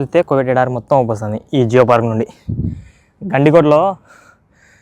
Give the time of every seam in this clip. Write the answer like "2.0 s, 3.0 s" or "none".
none